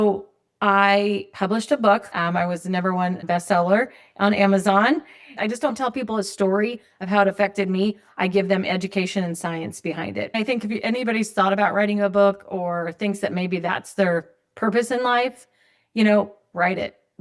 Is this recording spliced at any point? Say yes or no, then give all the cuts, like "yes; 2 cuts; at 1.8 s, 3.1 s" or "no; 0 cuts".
yes; 4 cuts; at 1.3 s, 3.2 s, 5.3 s, 10.3 s